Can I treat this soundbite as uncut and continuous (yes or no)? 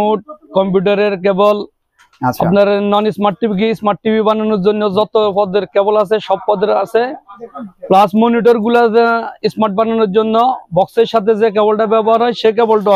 yes